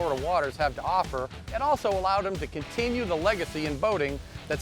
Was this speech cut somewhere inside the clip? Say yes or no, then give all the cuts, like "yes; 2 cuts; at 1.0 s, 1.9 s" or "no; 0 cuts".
yes; 1 cut; at 1.5 s